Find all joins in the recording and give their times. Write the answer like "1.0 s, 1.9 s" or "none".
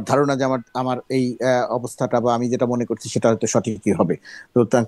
none

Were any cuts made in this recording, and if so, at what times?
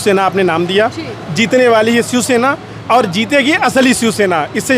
none

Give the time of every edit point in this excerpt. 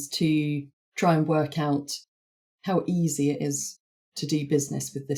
none

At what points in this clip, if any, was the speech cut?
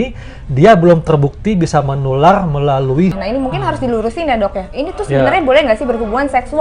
3.2 s

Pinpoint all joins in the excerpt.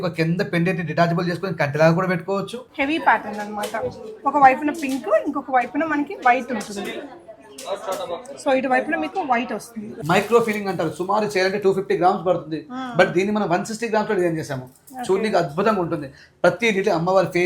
2.6 s, 10.0 s

